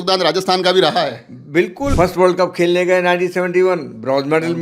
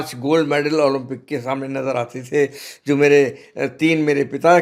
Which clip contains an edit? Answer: first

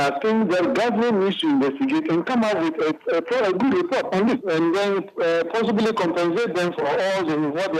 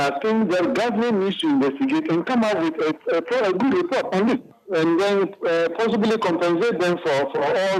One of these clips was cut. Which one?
first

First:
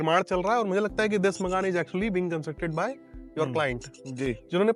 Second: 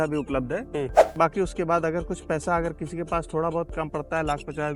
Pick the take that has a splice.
second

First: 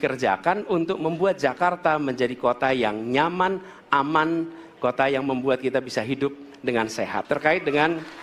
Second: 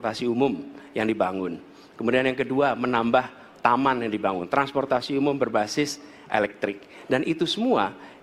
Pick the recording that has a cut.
first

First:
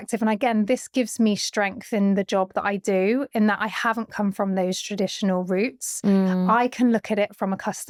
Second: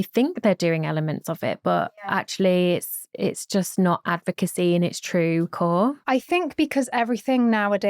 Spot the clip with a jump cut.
second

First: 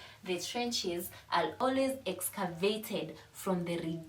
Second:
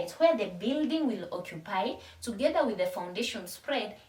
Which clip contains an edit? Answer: first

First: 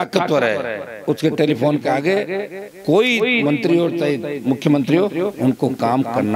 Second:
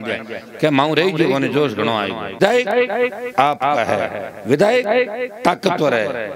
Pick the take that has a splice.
second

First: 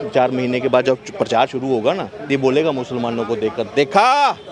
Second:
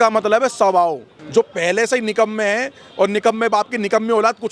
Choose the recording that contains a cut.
second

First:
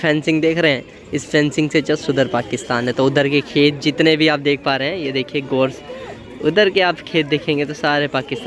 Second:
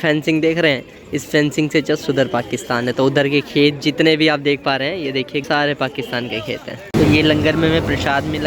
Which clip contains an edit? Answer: second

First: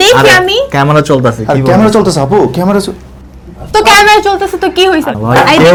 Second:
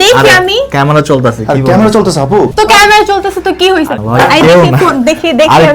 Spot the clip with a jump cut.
second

